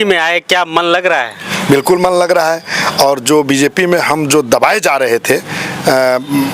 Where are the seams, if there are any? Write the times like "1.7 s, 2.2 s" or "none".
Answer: none